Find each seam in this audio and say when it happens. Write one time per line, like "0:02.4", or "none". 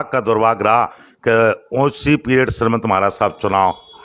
none